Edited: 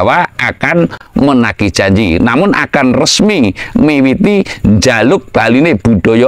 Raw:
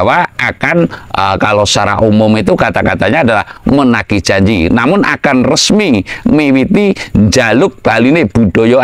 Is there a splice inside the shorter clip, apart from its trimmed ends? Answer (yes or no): yes